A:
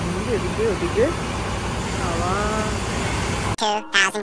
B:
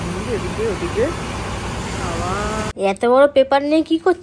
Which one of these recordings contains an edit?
B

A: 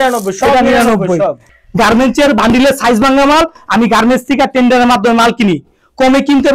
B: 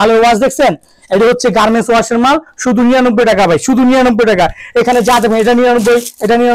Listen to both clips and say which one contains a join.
A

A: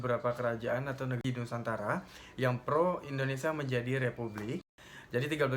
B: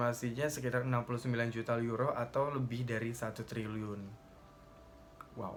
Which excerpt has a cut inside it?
A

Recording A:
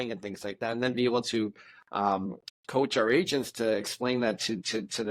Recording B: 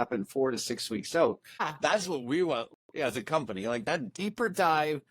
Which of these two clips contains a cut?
B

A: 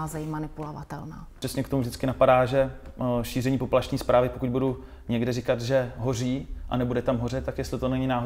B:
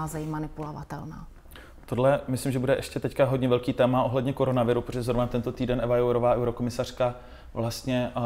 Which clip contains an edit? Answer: A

